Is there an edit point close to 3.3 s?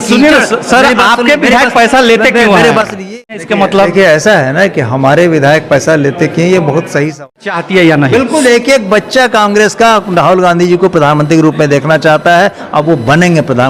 yes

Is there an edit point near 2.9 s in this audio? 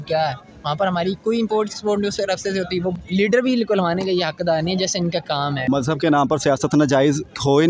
yes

